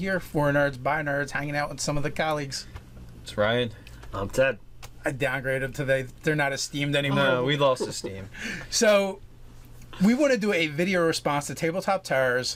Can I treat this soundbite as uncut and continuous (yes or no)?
yes